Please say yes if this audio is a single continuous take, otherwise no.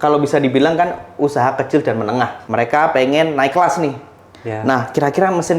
no